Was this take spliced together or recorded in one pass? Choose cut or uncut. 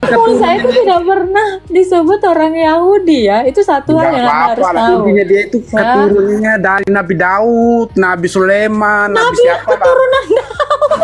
uncut